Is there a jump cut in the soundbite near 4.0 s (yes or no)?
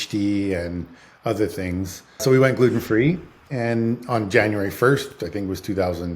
no